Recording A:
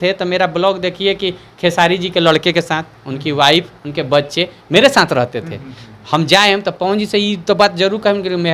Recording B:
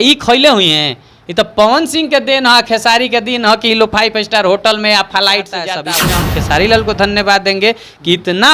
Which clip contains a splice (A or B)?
B